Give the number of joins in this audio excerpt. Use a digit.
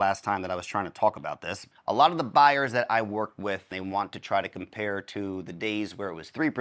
2